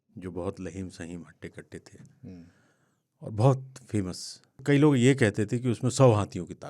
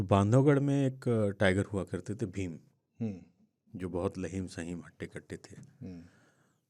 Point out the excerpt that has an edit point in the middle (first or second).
first